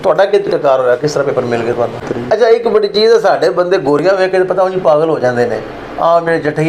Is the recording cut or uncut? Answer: cut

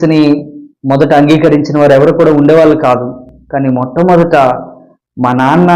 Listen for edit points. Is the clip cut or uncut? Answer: uncut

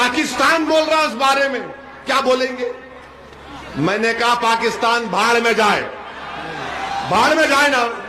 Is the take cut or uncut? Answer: uncut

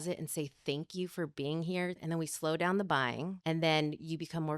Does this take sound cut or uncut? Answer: cut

